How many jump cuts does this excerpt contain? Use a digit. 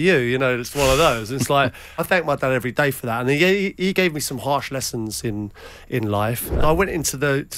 2